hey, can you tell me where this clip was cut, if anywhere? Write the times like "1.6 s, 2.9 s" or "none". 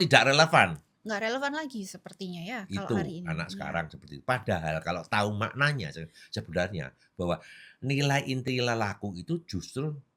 none